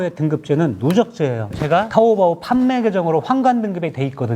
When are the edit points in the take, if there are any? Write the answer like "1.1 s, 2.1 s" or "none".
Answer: 1.5 s